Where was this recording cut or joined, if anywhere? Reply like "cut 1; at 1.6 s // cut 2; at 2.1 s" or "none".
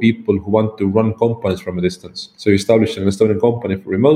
none